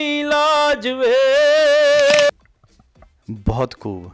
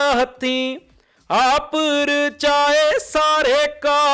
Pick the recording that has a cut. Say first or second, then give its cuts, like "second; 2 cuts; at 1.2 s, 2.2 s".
first; 1 cut; at 2.3 s